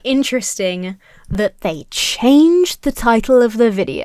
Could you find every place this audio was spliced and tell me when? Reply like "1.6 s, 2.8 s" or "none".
none